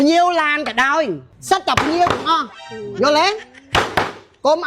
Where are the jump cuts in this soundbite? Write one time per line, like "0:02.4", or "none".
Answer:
0:01.3
0:03.6

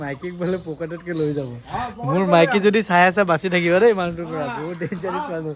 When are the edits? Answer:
none

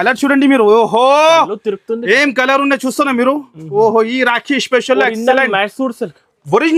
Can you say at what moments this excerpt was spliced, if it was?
none

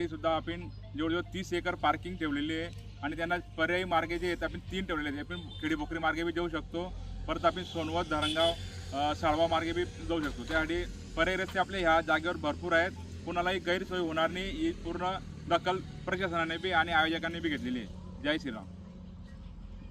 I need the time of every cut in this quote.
none

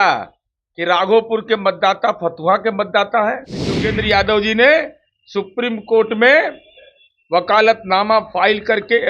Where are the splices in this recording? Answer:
0:03.9

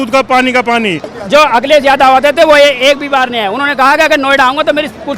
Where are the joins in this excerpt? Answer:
0:01.2

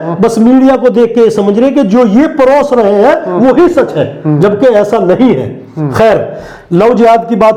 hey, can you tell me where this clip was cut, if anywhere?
none

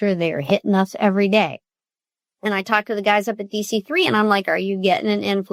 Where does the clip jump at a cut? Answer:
none

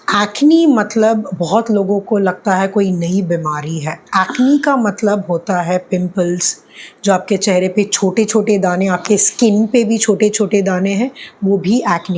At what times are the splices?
none

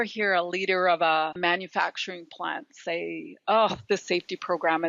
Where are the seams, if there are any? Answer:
none

